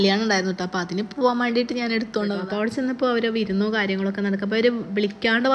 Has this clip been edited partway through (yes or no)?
yes